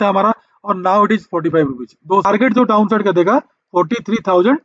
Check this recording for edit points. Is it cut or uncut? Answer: cut